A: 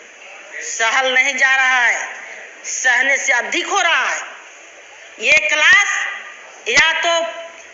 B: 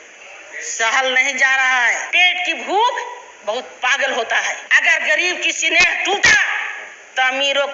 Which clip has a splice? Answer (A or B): B